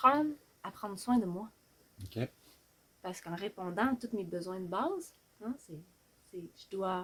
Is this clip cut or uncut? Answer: uncut